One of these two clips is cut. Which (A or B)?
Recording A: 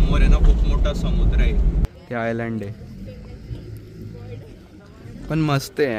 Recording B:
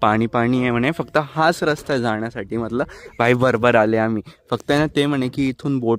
A